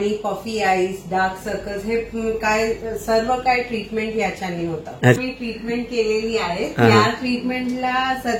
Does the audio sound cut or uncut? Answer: cut